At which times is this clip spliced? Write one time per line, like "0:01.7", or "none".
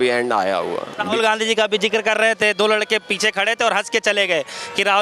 0:01.1